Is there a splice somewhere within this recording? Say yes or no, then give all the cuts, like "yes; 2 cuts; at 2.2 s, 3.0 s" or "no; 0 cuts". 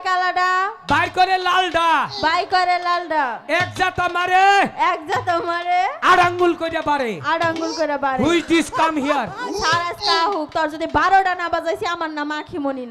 no; 0 cuts